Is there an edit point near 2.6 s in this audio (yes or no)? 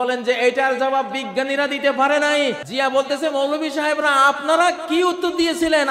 yes